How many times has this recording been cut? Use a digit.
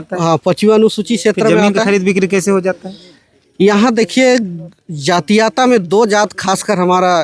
0